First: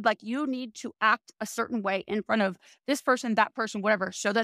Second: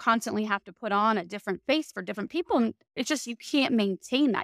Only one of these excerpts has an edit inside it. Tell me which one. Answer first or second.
second